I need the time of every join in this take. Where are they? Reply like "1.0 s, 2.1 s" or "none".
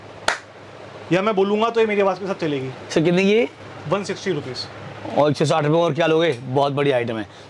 none